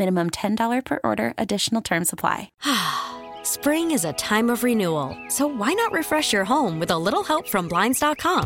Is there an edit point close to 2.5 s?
yes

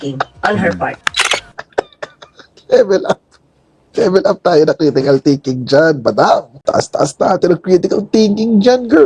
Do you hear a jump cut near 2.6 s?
no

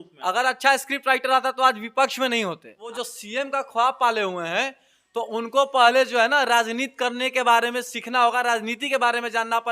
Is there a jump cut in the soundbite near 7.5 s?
no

